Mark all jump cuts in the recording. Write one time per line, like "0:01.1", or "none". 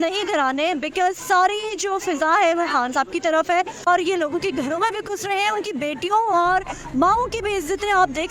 0:03.8